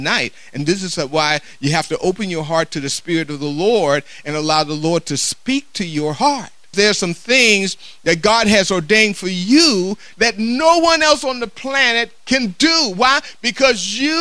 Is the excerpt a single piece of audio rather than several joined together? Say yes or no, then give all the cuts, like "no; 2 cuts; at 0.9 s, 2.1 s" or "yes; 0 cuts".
no; 2 cuts; at 6.7 s, 10.1 s